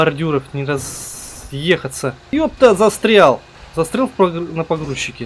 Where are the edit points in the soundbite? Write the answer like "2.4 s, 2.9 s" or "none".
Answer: 2.3 s, 3.6 s